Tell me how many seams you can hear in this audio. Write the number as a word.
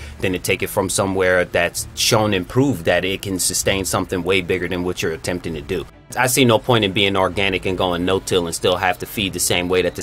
one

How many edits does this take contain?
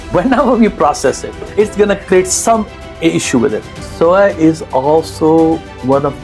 two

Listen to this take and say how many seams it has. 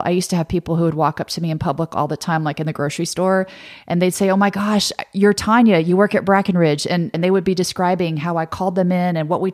one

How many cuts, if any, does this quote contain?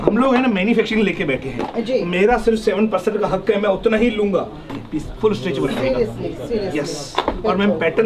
one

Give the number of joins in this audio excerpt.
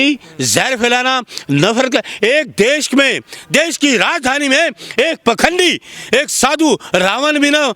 zero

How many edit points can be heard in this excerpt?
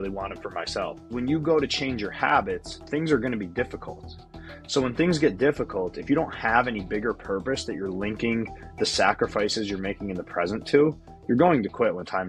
one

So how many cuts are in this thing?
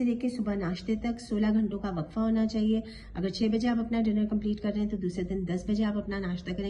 zero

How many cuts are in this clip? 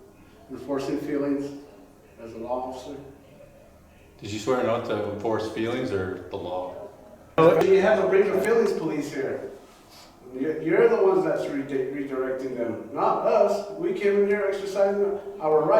one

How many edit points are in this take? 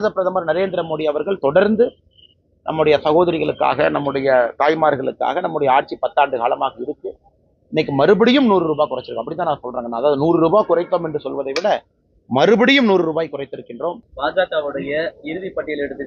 one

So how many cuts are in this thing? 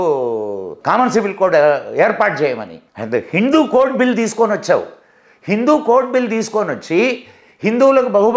zero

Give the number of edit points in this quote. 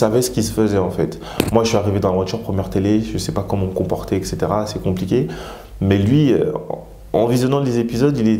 zero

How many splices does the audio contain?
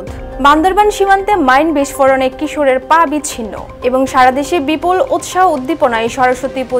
zero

